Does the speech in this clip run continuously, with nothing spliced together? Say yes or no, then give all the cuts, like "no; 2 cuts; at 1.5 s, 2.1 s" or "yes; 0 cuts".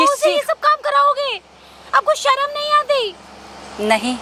yes; 0 cuts